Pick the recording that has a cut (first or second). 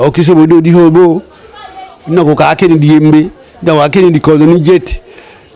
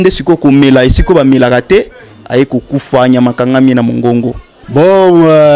second